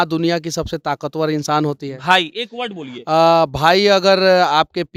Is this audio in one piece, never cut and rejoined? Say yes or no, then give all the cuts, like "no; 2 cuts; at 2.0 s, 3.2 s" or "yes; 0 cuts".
yes; 0 cuts